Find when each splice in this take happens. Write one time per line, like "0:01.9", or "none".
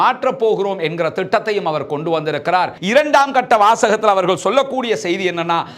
0:02.8